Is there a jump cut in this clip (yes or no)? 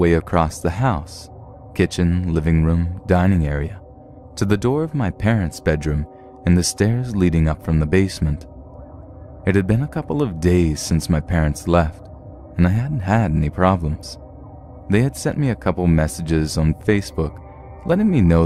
no